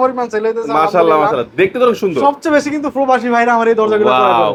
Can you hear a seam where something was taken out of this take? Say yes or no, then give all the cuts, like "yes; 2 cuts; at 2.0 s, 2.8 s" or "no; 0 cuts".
no; 0 cuts